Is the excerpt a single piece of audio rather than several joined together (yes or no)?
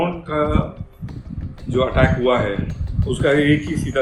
yes